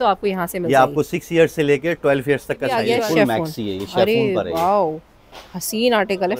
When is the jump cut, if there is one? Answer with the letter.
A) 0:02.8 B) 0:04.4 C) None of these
A